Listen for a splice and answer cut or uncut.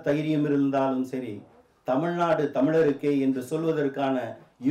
uncut